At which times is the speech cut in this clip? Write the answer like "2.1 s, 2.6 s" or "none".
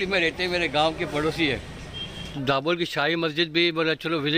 2.3 s